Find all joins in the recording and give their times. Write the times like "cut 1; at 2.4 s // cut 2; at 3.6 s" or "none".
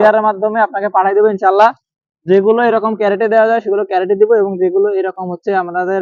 none